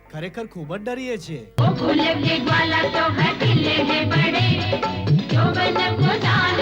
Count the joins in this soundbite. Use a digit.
1